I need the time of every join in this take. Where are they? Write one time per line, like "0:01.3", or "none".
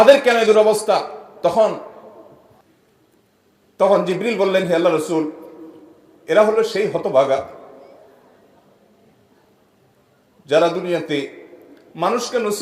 0:02.6